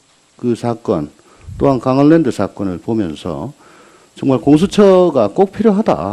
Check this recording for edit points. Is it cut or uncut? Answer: cut